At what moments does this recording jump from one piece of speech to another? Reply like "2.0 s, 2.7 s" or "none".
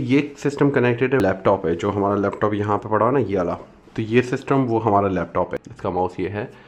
1.2 s, 5.6 s